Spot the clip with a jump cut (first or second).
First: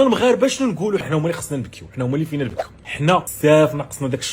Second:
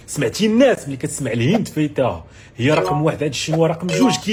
first